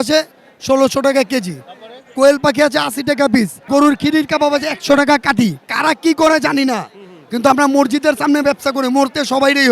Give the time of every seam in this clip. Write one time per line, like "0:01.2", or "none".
0:03.7
0:05.7